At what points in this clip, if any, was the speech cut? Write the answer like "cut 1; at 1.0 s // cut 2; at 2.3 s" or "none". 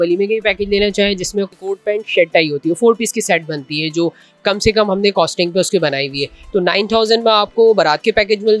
cut 1; at 1.5 s